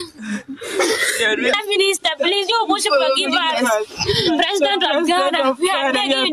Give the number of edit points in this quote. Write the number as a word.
zero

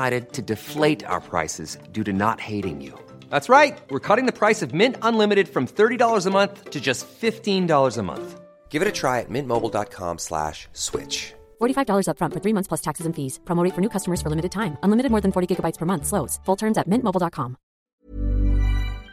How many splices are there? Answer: one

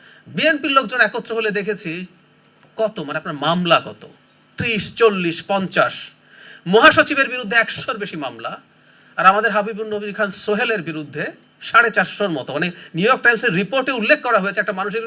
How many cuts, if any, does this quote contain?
zero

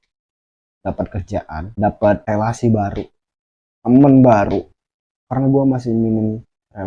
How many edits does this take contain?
two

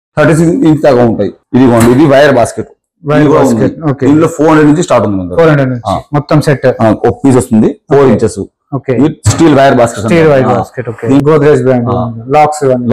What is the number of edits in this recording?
two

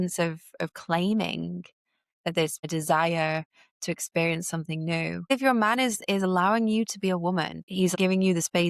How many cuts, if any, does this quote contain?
three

